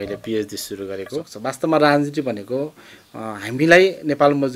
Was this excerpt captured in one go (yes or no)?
no